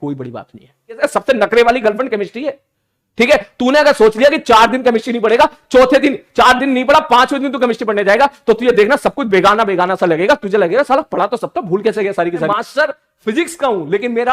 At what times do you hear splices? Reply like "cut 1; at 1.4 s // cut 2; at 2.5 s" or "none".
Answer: cut 1; at 1.0 s // cut 2; at 12.5 s